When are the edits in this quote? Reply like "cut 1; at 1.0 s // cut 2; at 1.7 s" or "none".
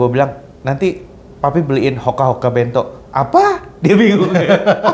none